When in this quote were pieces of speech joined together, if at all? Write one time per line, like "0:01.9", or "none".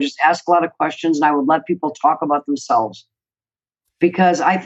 none